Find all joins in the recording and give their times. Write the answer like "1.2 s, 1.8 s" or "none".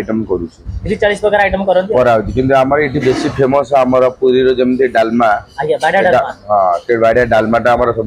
none